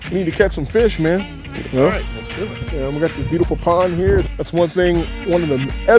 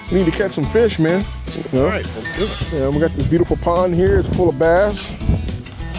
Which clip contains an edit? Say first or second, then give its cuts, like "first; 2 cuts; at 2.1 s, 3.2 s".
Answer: first; 1 cut; at 4.3 s